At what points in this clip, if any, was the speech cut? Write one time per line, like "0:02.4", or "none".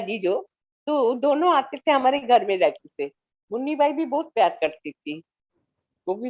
none